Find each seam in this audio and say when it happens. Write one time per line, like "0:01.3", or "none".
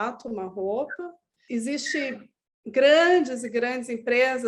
0:01.3